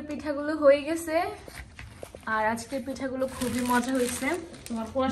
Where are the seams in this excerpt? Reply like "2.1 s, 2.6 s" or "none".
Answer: none